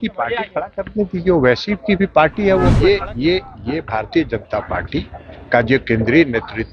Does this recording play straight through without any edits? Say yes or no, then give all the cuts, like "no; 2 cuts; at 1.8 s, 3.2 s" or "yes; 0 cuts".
no; 1 cut; at 2.7 s